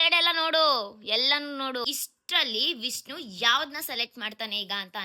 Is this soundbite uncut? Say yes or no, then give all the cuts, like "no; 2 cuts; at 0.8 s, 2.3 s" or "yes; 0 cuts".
no; 1 cut; at 1.8 s